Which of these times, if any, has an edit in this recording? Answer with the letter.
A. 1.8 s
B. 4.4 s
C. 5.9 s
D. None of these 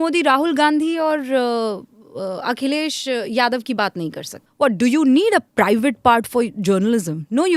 B